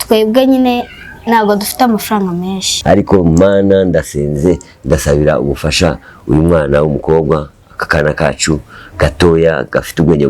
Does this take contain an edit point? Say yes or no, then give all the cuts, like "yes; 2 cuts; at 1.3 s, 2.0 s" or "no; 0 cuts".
yes; 1 cut; at 2.7 s